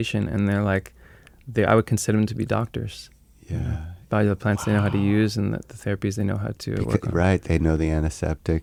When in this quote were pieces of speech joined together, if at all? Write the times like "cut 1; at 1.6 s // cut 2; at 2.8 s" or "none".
none